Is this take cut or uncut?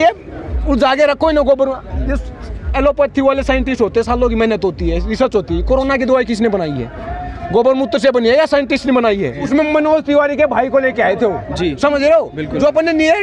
uncut